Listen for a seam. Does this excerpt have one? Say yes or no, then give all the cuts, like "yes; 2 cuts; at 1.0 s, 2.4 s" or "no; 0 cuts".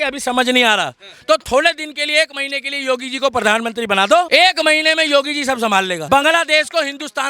yes; 2 cuts; at 4.3 s, 6.0 s